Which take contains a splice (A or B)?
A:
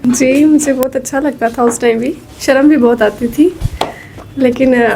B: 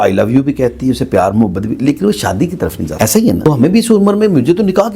B